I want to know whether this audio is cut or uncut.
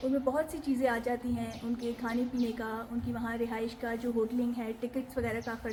uncut